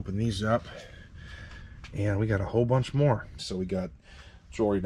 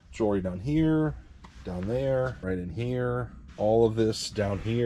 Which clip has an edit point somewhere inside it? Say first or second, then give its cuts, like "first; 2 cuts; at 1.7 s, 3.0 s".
first; 1 cut; at 3.4 s